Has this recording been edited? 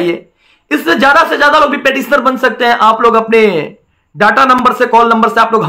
no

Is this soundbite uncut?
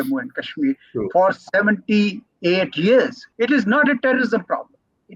no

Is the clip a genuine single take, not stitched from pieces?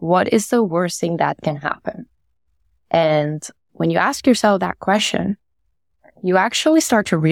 yes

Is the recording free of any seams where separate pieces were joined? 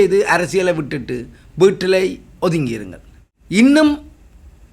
yes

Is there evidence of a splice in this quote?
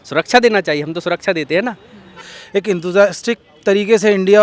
yes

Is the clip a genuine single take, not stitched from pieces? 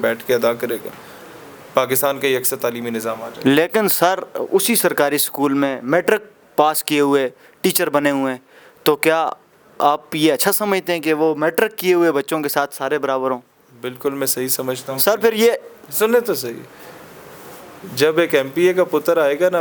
yes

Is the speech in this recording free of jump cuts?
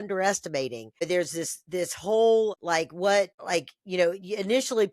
no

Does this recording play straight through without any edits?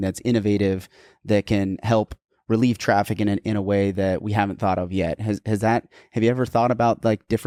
yes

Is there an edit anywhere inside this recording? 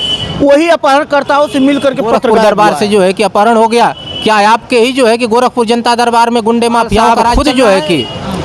yes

